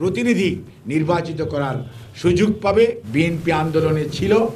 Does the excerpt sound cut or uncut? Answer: cut